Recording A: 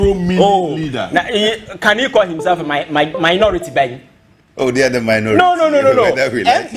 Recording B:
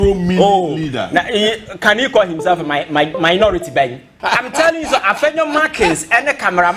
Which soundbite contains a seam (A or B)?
B